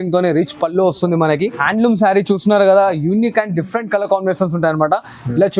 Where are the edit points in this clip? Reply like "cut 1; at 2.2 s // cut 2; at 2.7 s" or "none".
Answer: cut 1; at 1.6 s